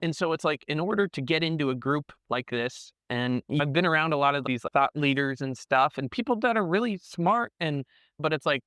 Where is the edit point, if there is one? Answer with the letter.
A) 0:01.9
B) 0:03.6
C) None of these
B